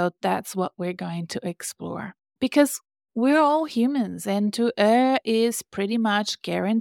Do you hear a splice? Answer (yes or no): yes